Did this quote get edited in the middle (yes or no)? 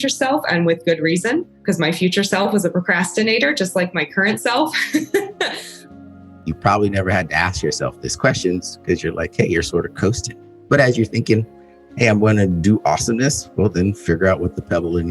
yes